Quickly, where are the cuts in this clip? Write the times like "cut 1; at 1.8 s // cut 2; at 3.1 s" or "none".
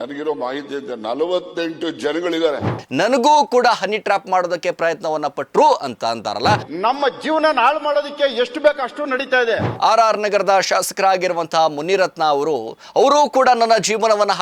cut 1; at 2.8 s // cut 2; at 6.6 s // cut 3; at 9.7 s